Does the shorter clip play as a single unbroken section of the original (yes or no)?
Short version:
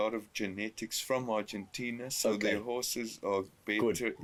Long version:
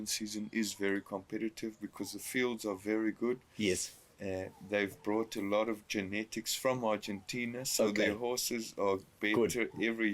yes